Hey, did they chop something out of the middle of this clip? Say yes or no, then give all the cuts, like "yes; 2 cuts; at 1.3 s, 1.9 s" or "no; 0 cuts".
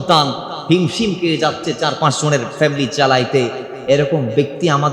no; 0 cuts